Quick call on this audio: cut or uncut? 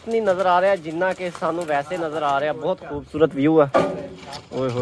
uncut